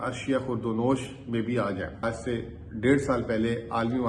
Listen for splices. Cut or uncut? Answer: cut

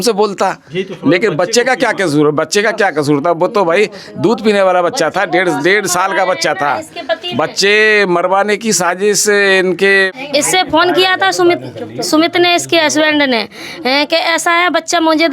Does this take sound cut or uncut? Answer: cut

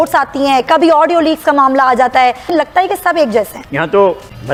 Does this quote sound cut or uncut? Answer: uncut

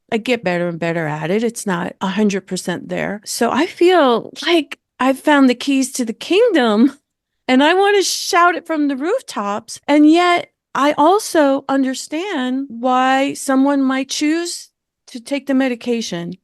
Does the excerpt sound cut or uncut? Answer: cut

